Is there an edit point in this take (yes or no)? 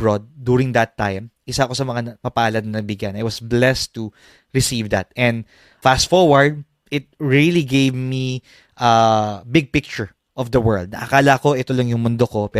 yes